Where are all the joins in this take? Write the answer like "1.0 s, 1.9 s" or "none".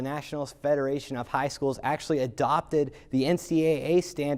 none